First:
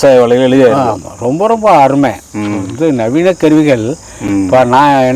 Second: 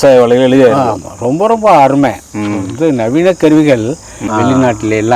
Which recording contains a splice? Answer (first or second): second